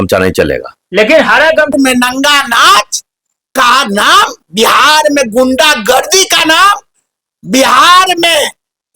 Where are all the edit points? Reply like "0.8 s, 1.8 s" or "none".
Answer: 1.7 s